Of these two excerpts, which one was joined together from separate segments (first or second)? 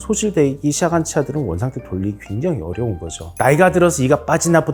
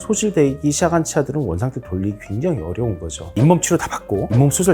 second